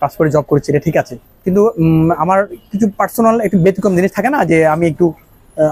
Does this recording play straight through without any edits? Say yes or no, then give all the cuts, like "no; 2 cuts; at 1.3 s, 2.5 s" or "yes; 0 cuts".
yes; 0 cuts